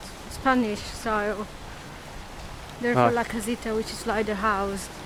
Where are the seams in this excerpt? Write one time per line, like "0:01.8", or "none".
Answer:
none